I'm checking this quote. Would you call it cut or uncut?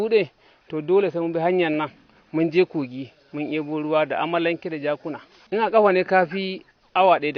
uncut